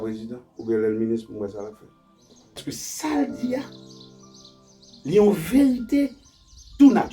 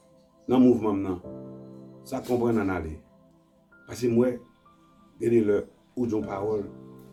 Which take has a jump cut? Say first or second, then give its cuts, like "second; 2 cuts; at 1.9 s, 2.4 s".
first; 1 cut; at 2.6 s